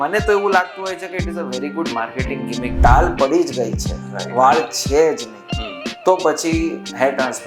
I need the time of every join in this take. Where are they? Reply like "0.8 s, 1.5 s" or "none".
2.7 s